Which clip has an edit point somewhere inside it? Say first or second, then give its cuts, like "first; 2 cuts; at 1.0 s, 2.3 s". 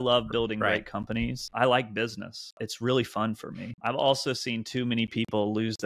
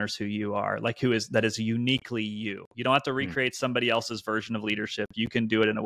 first; 3 cuts; at 1.5 s, 2.6 s, 3.7 s